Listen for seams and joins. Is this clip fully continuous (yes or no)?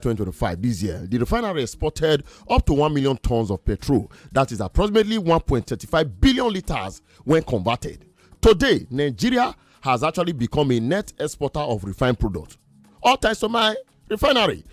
yes